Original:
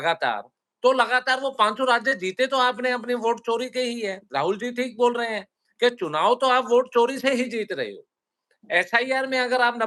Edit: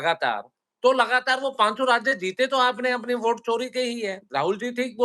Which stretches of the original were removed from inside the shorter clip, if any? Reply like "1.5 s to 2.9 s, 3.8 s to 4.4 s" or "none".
none